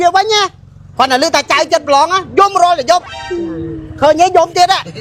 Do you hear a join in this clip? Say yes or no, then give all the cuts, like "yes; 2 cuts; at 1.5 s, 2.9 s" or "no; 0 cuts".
no; 0 cuts